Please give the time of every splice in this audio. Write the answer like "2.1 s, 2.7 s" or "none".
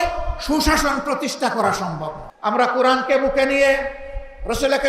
2.2 s